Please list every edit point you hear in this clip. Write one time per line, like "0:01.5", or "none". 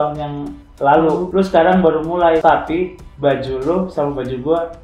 0:01.3
0:02.4